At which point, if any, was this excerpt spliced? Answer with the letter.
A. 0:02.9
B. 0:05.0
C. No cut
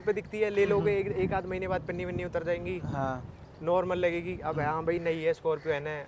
C